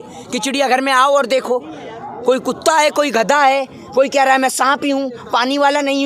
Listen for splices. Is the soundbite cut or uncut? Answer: uncut